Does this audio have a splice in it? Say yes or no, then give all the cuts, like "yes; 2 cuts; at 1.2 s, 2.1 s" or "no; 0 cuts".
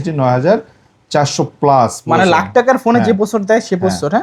no; 0 cuts